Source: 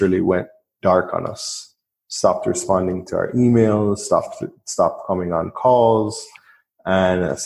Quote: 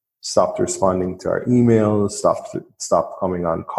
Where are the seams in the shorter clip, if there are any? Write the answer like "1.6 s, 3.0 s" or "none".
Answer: none